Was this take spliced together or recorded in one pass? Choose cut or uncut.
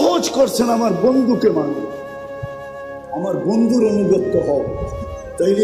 uncut